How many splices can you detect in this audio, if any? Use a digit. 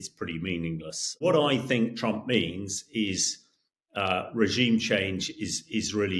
1